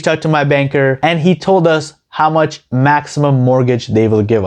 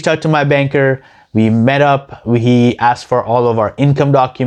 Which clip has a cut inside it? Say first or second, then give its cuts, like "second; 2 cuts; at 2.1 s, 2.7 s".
first; 1 cut; at 1.0 s